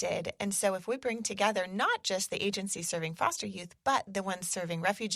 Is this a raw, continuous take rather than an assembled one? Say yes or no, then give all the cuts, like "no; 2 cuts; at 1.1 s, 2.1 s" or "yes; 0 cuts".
yes; 0 cuts